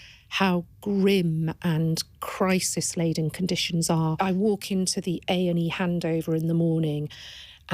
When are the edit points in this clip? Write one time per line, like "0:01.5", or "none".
0:04.1